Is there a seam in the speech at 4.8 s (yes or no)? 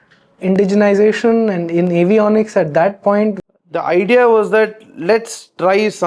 no